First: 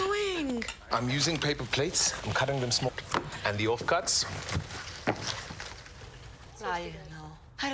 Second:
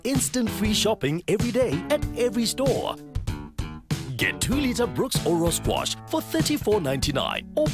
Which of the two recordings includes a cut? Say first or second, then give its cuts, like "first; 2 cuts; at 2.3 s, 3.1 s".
first; 1 cut; at 2.9 s